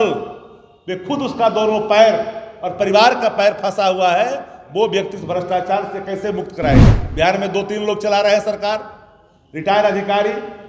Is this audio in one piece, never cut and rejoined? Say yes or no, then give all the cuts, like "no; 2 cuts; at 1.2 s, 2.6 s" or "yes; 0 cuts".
no; 1 cut; at 7.0 s